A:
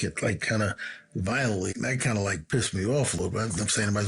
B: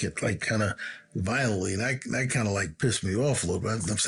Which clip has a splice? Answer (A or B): A